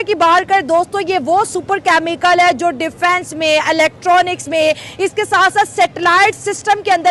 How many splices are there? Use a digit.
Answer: 0